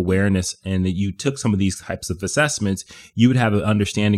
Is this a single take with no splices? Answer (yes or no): yes